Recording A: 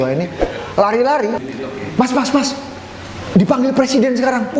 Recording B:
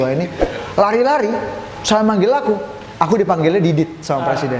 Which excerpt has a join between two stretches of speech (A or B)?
A